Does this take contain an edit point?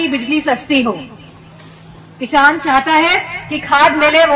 no; 0 cuts

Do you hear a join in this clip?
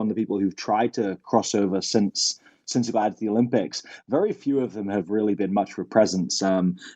no; 0 cuts

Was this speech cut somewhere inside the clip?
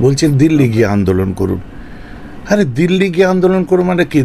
no; 0 cuts

